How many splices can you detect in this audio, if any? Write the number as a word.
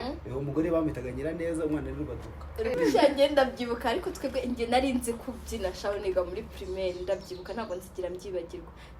one